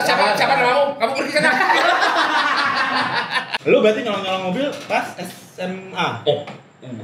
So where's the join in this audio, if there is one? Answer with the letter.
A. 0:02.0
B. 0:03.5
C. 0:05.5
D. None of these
B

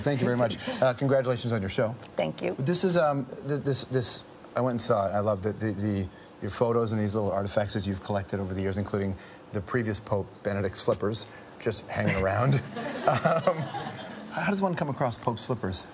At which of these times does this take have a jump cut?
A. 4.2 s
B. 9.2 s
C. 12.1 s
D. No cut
C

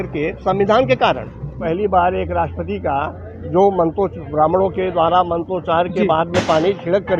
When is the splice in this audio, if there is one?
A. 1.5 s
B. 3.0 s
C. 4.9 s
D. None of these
A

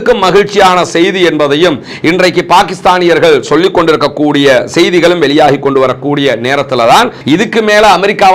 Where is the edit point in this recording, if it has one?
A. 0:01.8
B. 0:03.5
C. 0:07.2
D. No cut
C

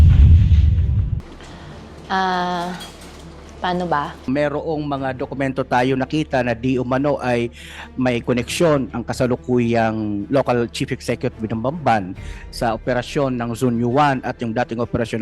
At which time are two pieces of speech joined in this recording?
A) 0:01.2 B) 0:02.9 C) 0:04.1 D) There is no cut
C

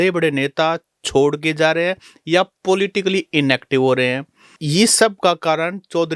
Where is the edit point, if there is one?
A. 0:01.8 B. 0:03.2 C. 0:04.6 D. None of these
C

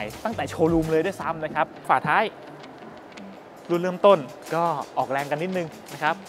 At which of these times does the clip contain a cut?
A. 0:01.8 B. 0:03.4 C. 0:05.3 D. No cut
A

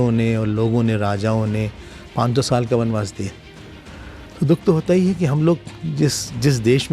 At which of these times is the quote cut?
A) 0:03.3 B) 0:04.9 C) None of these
C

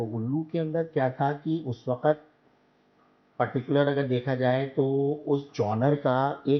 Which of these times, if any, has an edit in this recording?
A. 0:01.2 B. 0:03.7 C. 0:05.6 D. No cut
D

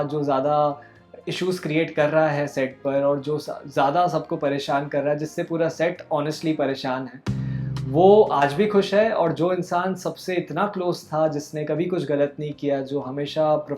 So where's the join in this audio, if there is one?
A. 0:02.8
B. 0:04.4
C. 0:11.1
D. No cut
D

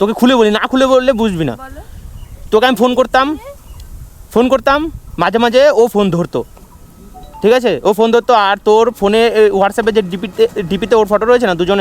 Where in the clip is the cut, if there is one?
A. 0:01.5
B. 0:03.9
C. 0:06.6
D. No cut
C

